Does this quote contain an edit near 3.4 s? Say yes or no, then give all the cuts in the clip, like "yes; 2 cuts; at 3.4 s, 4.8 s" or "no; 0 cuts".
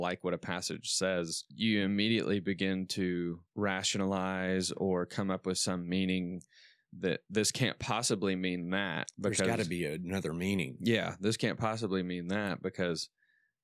yes; 2 cuts; at 1.4 s, 3.4 s